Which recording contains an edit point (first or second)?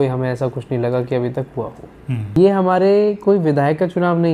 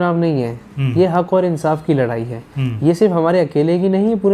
first